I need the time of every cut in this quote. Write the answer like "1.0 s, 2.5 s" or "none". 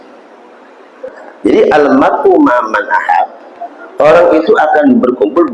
1.2 s